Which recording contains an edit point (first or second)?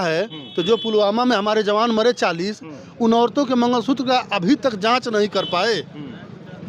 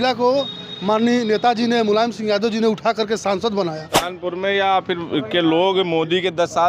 second